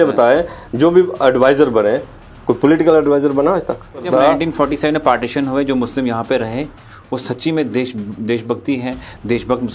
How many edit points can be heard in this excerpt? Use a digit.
1